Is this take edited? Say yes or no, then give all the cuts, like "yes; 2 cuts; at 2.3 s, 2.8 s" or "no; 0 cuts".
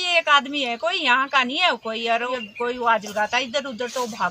yes; 1 cut; at 2.3 s